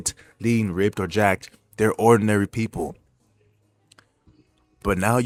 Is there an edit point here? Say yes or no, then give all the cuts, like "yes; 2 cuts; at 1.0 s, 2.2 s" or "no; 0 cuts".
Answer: no; 0 cuts